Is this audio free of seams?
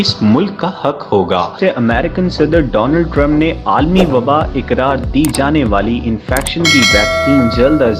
no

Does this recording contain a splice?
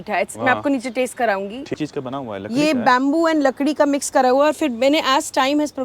yes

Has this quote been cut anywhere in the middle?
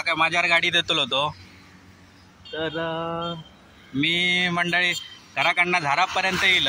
no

